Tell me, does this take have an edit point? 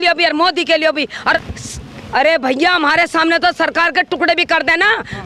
yes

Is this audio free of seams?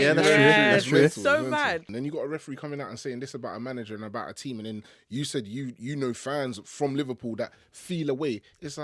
no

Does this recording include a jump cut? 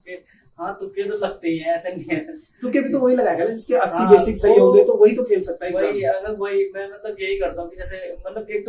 no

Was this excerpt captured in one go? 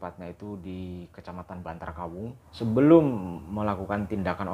no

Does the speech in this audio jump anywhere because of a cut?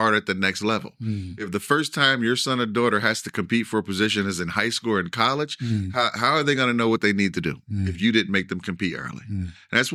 no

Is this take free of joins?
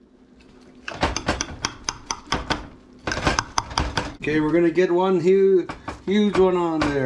no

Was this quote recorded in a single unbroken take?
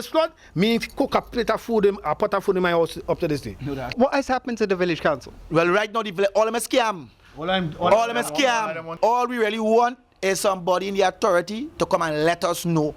no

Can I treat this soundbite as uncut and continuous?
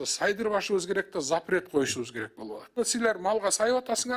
no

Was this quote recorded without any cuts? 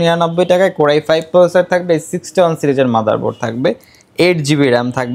yes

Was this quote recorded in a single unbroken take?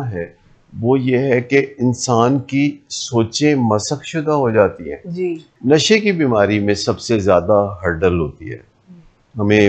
no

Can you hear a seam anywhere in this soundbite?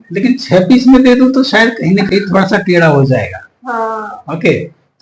no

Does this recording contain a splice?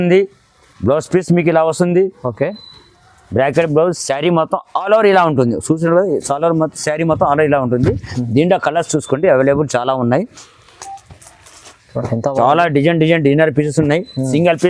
no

